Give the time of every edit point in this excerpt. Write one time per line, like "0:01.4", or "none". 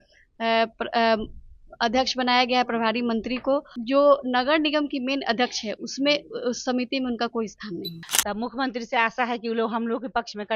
0:03.7
0:08.0

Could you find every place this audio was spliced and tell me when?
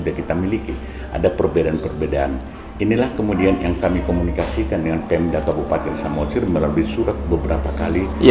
none

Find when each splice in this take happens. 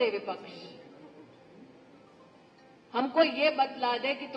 none

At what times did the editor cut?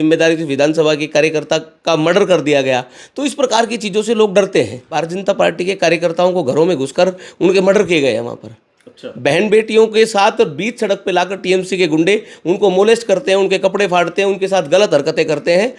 0:04.9

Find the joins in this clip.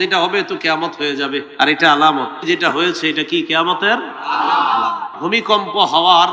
0:01.5
0:02.3
0:05.1

